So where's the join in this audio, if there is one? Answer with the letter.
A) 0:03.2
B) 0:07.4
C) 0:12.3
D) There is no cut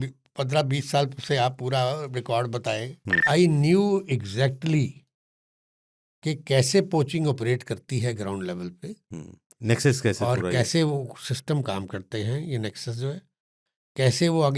A